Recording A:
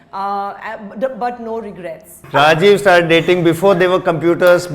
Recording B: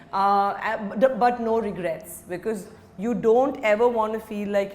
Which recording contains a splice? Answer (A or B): A